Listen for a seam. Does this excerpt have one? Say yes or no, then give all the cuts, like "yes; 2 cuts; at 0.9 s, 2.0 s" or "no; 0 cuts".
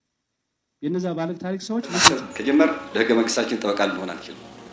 yes; 1 cut; at 2.2 s